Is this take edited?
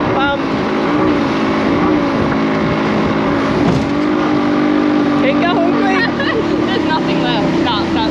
no; 0 cuts

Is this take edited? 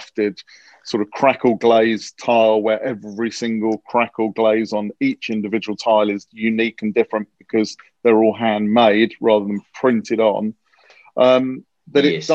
no; 0 cuts

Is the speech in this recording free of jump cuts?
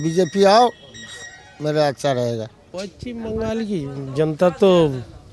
no; 1 cut; at 2.5 s

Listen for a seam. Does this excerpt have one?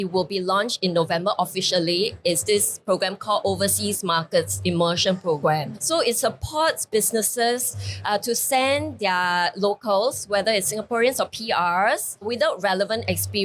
no; 0 cuts

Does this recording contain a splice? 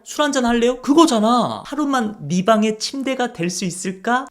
yes; 1 cut; at 1.6 s

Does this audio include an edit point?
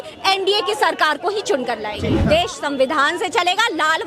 yes; 1 cut; at 2.2 s

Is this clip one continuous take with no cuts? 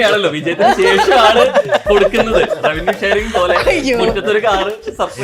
yes; 0 cuts

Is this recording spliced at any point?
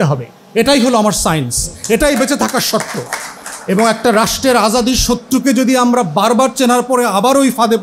no; 0 cuts

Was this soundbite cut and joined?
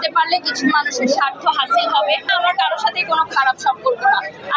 yes; 1 cut; at 2.3 s

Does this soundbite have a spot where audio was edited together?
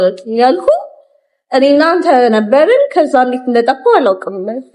no; 0 cuts

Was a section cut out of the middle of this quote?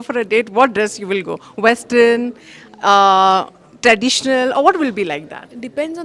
no; 0 cuts

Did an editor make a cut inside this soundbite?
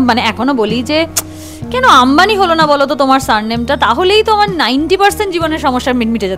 no; 0 cuts

